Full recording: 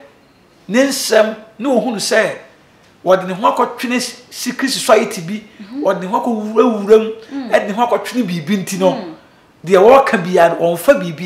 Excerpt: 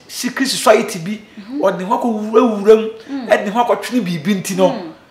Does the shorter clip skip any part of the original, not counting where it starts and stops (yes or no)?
no